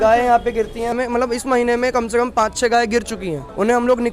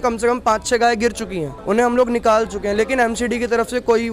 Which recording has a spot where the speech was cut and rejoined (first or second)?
first